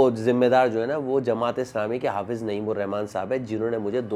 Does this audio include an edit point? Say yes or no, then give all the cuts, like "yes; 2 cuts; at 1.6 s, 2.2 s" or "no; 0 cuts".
no; 0 cuts